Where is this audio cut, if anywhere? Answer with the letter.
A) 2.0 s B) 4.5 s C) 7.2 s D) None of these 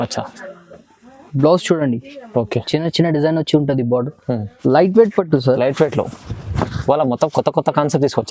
B